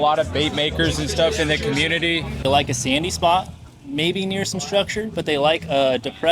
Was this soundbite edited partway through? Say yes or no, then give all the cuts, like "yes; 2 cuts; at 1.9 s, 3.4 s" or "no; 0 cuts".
yes; 1 cut; at 2.4 s